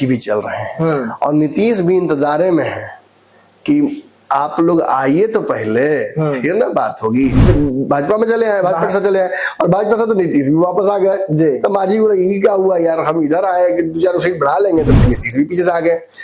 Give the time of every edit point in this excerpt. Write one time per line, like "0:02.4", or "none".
0:07.4